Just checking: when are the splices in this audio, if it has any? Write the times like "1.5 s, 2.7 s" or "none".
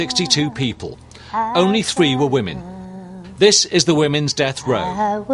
none